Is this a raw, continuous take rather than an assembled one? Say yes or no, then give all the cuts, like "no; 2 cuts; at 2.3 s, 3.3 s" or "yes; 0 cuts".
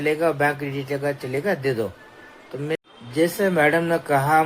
no; 1 cut; at 2.8 s